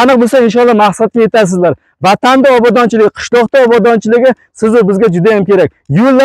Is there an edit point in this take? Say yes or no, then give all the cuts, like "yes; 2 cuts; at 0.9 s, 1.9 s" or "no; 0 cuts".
no; 0 cuts